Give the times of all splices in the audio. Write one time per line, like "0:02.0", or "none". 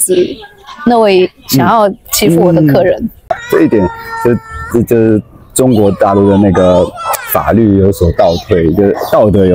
0:03.3

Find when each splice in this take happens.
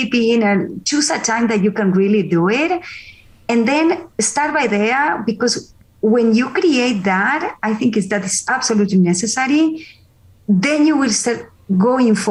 none

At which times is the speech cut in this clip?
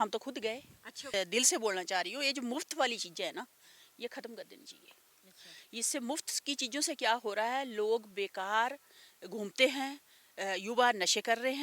0:01.1

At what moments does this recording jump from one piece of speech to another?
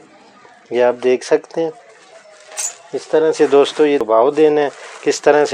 0:04.0

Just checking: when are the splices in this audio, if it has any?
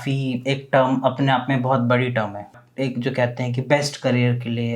0:02.6

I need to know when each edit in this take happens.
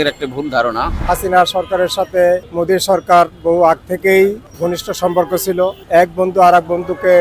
0:00.9
0:02.5
0:04.5
0:05.8

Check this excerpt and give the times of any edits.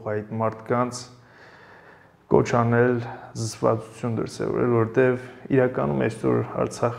none

